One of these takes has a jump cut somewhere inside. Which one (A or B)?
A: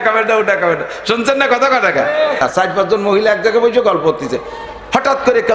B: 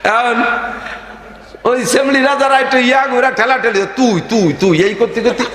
A